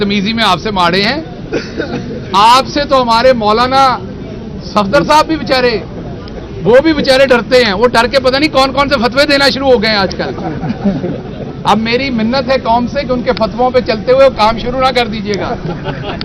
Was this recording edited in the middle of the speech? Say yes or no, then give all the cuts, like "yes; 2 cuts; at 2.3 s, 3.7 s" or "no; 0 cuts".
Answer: no; 0 cuts